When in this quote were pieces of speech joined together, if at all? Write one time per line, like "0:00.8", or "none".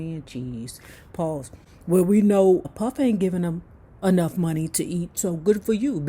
0:02.7

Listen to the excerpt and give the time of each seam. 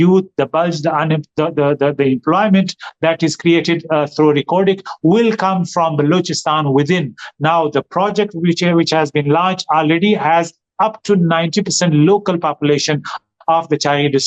none

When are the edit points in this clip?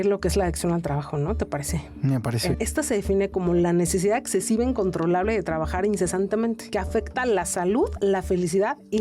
0:02.6

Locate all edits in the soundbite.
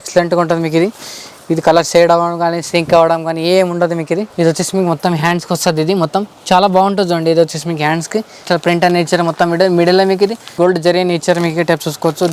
0:04.3
0:08.4
0:10.4

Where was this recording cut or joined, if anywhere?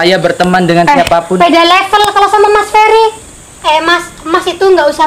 0:03.2

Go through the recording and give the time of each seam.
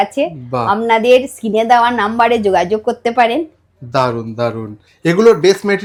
none

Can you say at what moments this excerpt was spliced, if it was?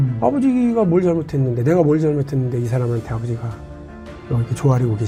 none

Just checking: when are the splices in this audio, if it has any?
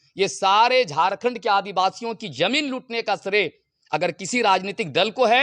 none

